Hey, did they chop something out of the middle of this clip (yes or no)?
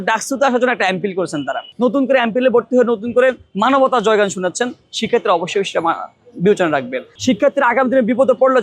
yes